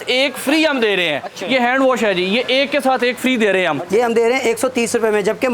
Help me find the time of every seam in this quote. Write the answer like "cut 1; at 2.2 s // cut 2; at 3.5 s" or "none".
cut 1; at 1.3 s // cut 2; at 3.8 s